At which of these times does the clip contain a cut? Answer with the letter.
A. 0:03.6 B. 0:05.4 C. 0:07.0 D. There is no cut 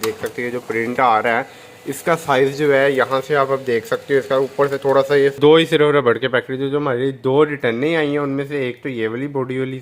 B